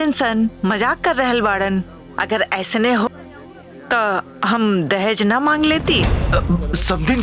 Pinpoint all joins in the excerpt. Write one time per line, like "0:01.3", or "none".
0:03.1